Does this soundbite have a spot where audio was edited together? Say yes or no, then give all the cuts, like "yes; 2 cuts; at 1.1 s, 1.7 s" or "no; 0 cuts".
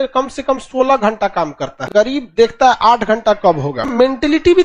yes; 2 cuts; at 2.2 s, 3.9 s